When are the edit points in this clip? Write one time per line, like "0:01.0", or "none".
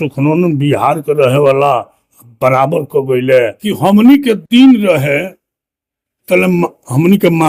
0:03.6